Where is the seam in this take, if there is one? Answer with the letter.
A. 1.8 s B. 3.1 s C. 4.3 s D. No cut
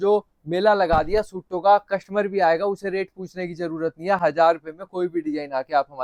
D